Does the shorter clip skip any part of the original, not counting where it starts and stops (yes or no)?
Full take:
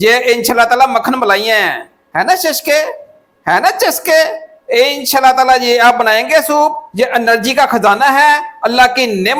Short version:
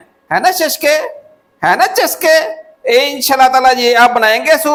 no